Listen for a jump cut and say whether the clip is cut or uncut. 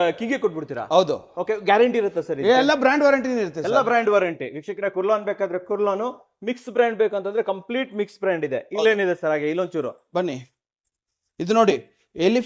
uncut